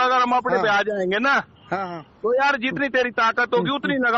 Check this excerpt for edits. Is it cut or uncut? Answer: uncut